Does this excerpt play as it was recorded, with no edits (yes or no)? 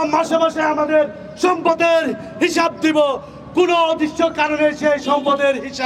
yes